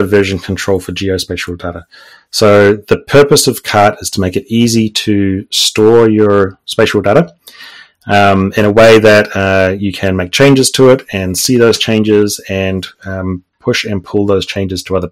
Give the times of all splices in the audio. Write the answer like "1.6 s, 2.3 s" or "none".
none